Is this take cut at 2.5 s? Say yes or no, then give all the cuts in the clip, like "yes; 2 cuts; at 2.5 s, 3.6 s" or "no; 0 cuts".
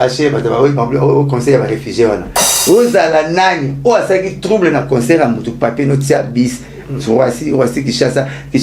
yes; 1 cut; at 2.5 s